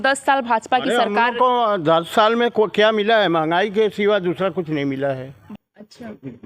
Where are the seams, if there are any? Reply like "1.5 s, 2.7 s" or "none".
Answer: 5.4 s